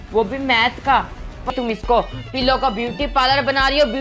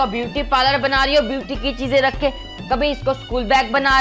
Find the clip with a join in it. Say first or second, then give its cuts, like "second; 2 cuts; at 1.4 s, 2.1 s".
first; 1 cut; at 1.5 s